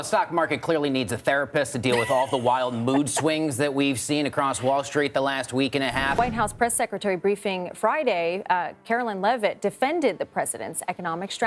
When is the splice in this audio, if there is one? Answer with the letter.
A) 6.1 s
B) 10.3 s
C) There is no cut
A